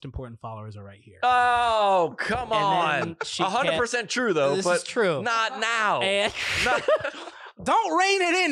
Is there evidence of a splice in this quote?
no; 0 cuts

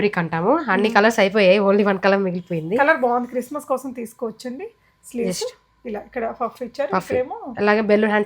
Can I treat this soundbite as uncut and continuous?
yes; 0 cuts

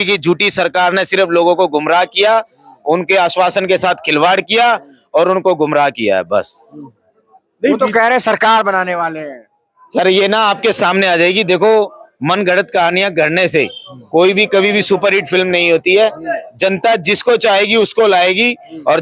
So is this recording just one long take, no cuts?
yes; 0 cuts

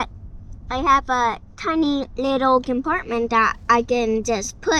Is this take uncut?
yes; 0 cuts

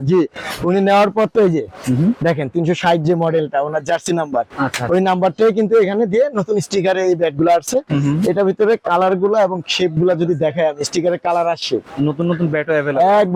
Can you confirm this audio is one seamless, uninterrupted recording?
yes; 0 cuts

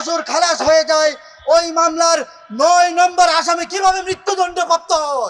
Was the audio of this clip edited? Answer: no; 0 cuts

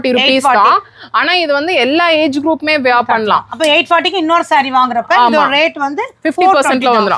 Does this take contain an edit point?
no; 0 cuts

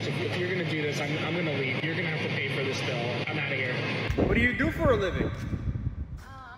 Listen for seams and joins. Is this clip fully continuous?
no; 1 cut; at 4.1 s

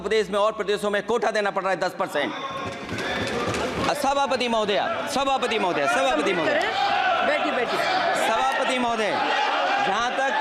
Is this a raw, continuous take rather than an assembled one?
yes; 0 cuts

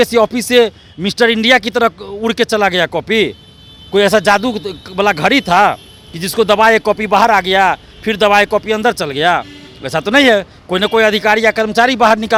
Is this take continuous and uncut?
yes; 0 cuts

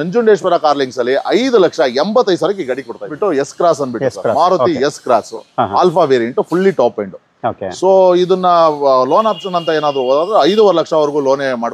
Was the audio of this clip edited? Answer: no; 0 cuts

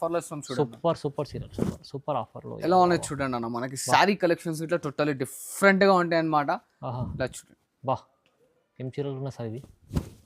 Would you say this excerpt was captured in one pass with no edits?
yes; 0 cuts

